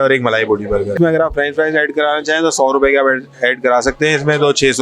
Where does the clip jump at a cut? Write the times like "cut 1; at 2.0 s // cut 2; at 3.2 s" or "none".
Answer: cut 1; at 0.9 s